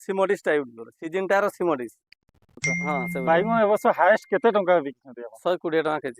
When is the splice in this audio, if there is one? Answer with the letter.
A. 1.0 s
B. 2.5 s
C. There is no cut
B